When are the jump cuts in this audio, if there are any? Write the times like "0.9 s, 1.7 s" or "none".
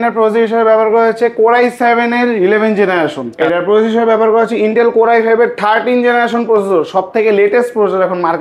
3.3 s

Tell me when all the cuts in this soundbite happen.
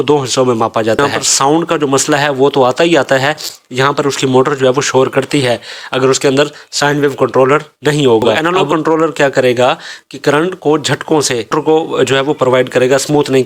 1.0 s, 8.4 s, 11.5 s

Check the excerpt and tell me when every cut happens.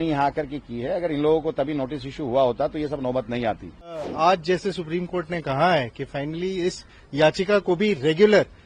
4.0 s

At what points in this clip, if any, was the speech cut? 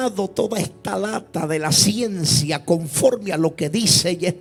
none

